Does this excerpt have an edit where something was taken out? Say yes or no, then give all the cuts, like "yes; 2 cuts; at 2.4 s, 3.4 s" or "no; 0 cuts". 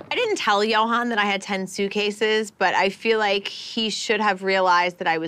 no; 0 cuts